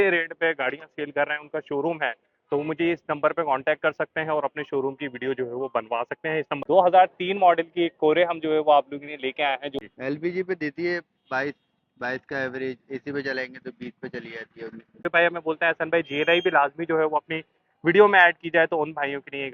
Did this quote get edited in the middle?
yes; 3 cuts; at 6.6 s, 9.7 s, 15.0 s

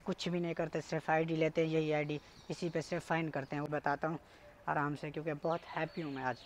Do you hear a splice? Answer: yes; 1 cut; at 3.7 s

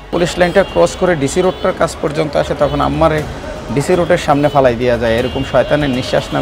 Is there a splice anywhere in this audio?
no; 0 cuts

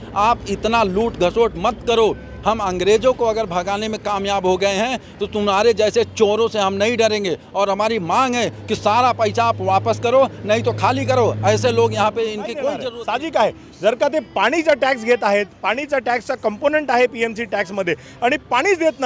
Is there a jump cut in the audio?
yes; 1 cut; at 12.8 s

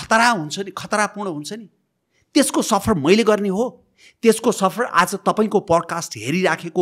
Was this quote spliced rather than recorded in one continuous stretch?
no; 0 cuts

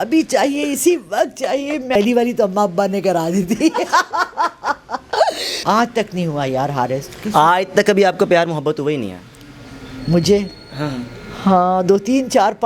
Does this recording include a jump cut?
yes; 2 cuts; at 1.9 s, 5.5 s

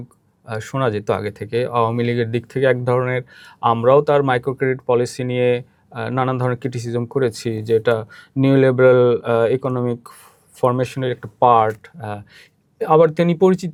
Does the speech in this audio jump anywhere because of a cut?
no; 0 cuts

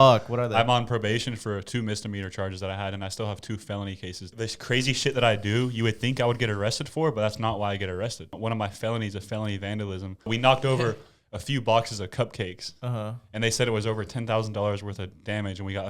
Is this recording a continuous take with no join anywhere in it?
no; 3 cuts; at 4.3 s, 8.3 s, 10.3 s

